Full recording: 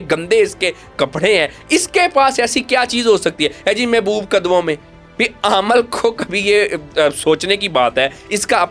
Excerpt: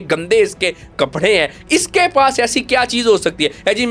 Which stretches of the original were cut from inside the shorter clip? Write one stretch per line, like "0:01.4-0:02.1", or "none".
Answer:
none